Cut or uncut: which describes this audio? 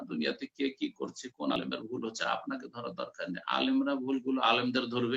cut